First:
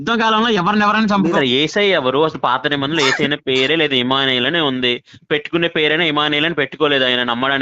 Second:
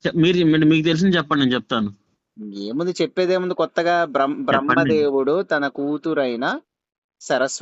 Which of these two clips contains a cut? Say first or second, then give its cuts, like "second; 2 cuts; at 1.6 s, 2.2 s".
first; 1 cut; at 1.3 s